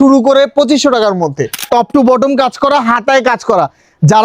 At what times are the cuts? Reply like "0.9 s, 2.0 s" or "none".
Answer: 1.6 s